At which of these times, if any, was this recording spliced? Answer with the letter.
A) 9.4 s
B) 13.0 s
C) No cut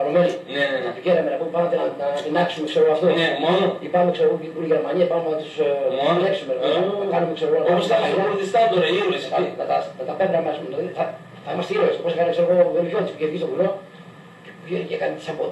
C